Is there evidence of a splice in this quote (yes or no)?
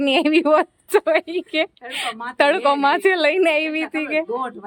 no